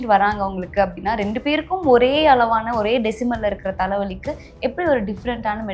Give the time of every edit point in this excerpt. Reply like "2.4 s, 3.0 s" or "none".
none